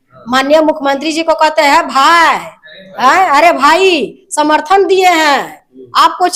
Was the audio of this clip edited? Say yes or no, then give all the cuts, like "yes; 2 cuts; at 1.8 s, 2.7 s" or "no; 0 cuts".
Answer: no; 0 cuts